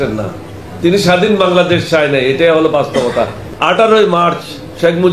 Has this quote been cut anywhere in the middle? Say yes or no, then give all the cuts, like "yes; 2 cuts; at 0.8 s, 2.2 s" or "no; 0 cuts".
yes; 1 cut; at 3.4 s